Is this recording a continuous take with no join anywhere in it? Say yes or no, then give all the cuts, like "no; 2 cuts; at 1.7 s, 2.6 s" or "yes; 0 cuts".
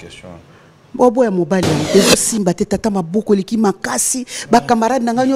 no; 1 cut; at 1.8 s